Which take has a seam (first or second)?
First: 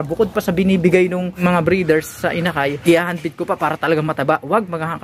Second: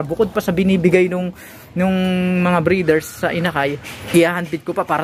first